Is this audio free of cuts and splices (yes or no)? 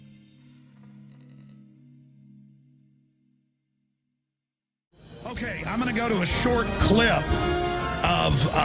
yes